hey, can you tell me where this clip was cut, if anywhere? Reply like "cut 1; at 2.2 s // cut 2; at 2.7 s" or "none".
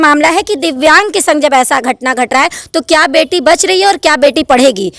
none